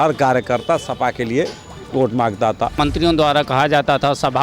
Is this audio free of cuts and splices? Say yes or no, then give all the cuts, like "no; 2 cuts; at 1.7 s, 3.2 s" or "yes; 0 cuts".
no; 1 cut; at 2.7 s